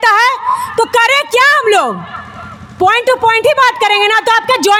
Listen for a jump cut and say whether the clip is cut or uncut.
uncut